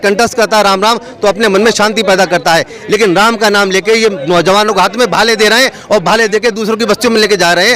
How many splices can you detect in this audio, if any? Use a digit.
0